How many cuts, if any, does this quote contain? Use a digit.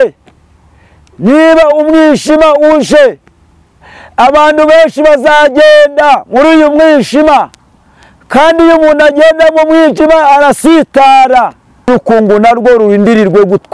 1